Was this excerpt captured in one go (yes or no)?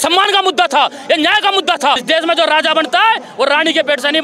no